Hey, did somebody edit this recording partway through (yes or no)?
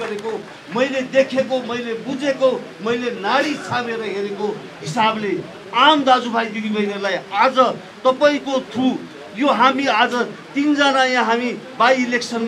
no